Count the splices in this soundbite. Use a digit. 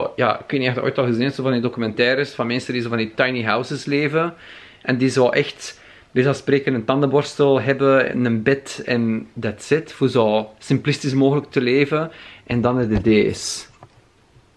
0